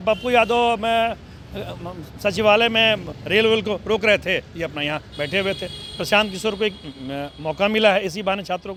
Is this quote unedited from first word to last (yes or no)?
yes